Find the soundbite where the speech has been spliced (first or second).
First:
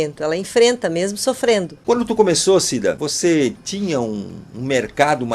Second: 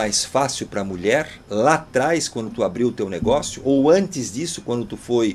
first